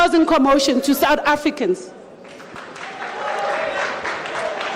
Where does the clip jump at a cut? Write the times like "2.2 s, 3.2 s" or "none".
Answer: none

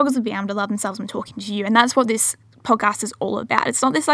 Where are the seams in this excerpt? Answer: none

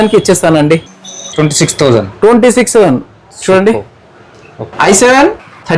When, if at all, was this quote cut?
4.7 s

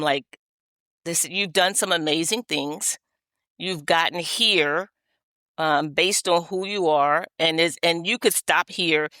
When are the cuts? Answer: none

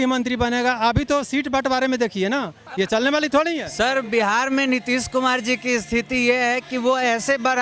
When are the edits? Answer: 3.6 s

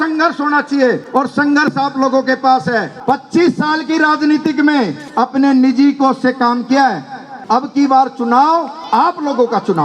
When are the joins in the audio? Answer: 1.0 s, 2.9 s, 5.0 s, 7.3 s, 8.8 s

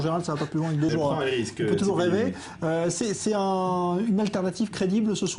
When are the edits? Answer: 0.9 s

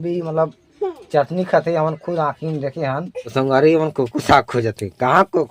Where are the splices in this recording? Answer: 3.2 s

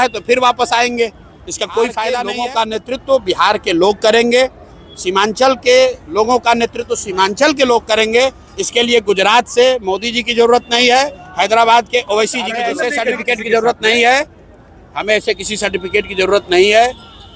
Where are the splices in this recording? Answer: 2.3 s, 12.6 s

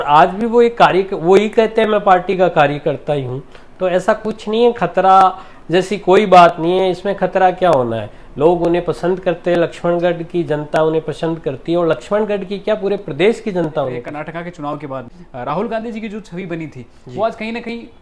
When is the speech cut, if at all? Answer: 14.0 s, 15.2 s

